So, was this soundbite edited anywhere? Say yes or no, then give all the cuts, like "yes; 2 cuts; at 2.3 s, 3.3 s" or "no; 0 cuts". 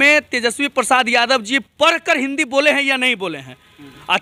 no; 0 cuts